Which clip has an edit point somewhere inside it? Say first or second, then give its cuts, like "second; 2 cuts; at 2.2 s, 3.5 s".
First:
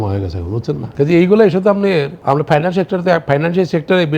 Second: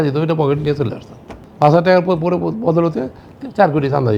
first; 2 cuts; at 0.9 s, 2.1 s